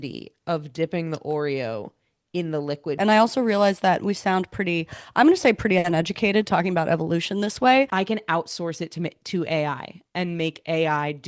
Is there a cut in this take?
yes; 2 cuts; at 3.0 s, 7.9 s

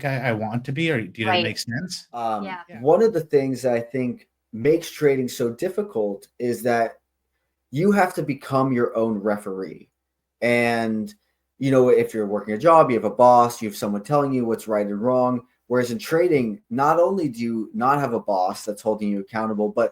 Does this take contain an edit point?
yes; 1 cut; at 2.3 s

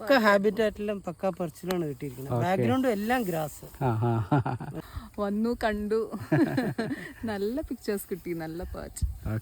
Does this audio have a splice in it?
yes; 1 cut; at 4.8 s

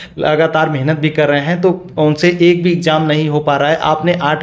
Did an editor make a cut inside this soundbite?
no; 0 cuts

